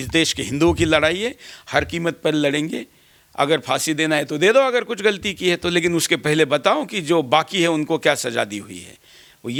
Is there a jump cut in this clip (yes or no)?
no